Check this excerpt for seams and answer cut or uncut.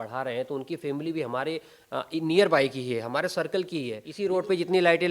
cut